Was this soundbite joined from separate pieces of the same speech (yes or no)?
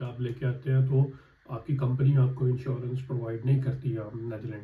no